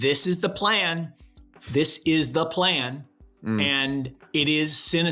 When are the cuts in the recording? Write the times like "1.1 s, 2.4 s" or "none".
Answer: 4.2 s